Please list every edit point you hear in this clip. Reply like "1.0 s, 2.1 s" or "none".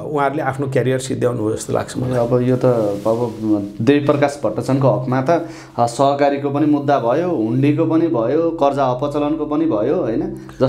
none